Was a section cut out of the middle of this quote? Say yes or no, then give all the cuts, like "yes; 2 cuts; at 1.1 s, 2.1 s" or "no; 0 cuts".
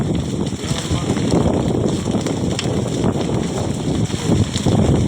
no; 0 cuts